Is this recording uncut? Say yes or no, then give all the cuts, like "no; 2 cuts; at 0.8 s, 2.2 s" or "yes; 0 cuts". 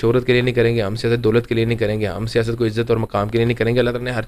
yes; 0 cuts